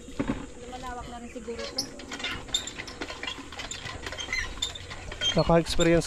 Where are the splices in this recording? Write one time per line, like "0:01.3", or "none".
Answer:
none